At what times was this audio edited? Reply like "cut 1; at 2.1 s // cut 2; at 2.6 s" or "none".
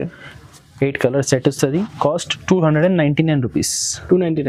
none